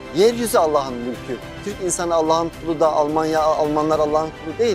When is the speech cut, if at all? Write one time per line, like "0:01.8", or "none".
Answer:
0:01.6